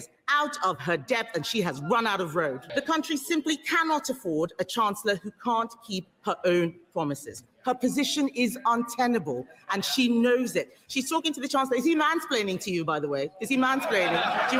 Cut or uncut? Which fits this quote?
uncut